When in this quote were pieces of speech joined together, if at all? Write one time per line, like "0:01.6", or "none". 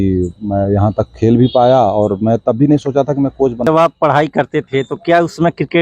0:03.7